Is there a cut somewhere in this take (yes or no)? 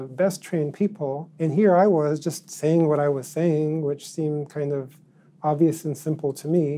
yes